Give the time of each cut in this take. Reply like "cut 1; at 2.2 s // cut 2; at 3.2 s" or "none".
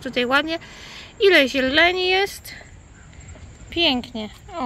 none